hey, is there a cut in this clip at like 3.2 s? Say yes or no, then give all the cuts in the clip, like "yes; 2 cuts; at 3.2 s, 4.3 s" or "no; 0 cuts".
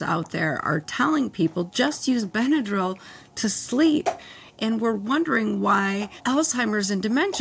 no; 1 cut; at 6.2 s